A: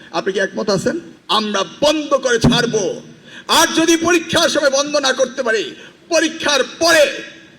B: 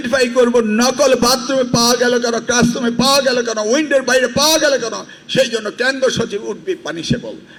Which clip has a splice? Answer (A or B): A